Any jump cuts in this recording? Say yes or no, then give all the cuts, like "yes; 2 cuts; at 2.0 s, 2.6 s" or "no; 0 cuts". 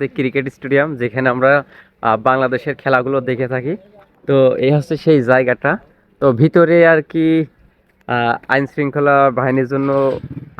no; 0 cuts